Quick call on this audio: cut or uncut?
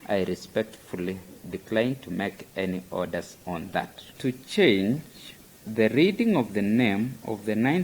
cut